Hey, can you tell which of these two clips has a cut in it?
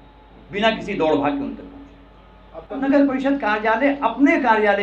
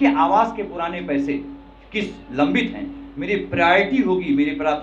first; 1 cut; at 2.8 s

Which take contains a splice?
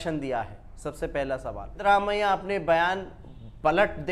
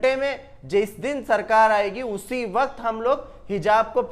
first; 1 cut; at 1.8 s

